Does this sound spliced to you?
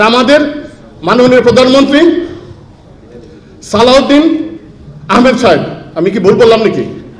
no; 0 cuts

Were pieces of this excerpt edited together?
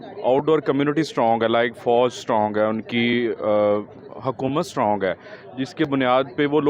no; 0 cuts

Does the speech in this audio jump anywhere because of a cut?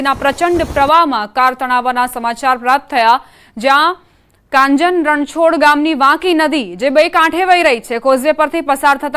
yes; 1 cut; at 2.1 s

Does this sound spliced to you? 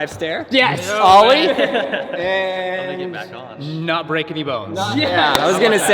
no; 0 cuts

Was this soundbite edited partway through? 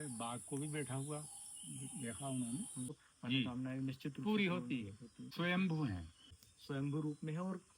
yes; 2 cuts; at 3.0 s, 5.2 s

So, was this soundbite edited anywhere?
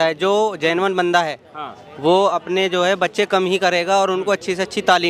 no; 0 cuts

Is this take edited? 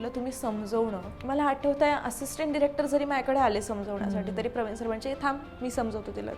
yes; 1 cut; at 1.1 s

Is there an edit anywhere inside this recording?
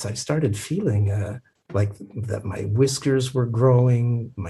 no; 0 cuts

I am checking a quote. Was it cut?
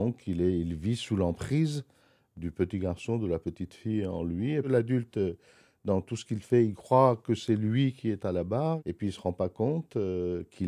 yes; 2 cuts; at 4.7 s, 8.8 s

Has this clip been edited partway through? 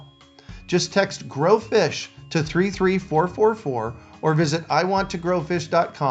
no; 0 cuts

